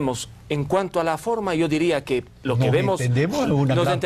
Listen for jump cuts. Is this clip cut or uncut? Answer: uncut